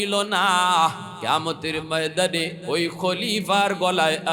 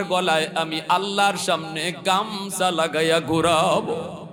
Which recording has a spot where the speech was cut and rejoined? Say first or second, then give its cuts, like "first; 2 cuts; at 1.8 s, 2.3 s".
first; 2 cuts; at 1.1 s, 2.6 s